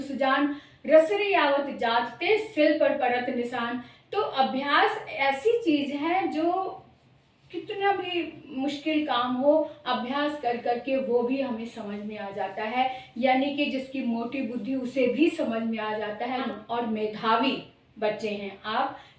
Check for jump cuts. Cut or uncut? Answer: cut